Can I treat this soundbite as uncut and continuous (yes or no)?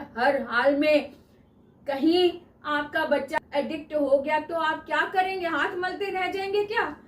no